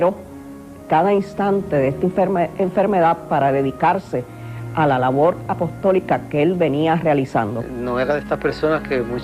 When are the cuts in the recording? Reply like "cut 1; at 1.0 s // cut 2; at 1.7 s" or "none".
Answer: cut 1; at 6.2 s